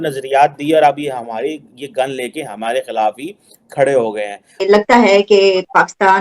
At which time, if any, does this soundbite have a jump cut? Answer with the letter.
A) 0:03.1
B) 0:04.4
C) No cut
B